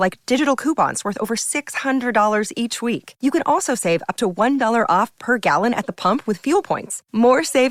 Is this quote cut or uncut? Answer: uncut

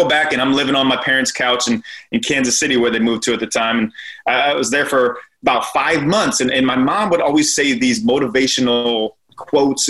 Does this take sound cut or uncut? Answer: uncut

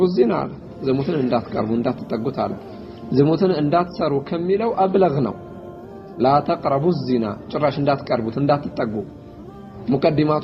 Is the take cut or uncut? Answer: uncut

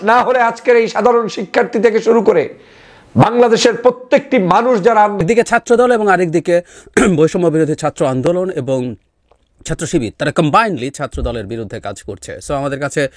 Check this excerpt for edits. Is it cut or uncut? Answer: cut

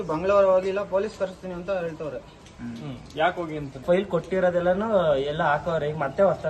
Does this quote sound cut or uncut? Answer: cut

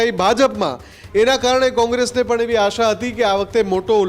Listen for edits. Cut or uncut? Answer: uncut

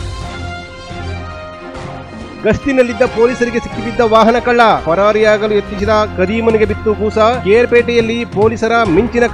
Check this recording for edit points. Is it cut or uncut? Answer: uncut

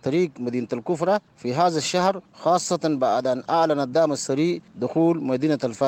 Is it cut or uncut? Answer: cut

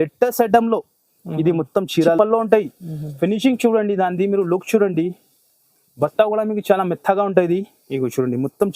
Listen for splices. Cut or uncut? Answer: cut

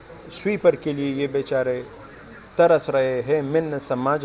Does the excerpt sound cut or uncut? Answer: uncut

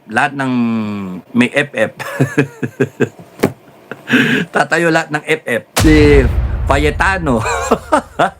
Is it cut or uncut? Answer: cut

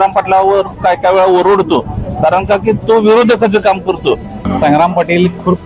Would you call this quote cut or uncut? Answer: cut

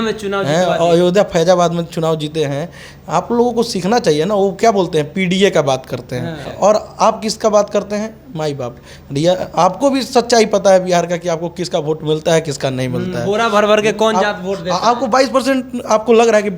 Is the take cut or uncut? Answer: cut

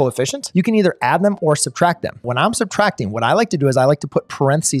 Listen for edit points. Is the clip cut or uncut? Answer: cut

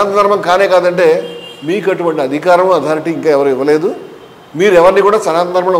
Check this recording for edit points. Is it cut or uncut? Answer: uncut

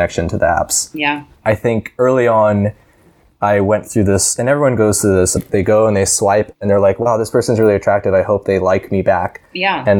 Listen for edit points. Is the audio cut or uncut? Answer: cut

